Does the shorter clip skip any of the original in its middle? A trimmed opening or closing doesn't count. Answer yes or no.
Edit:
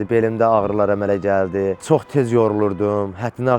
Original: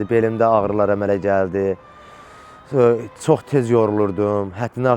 yes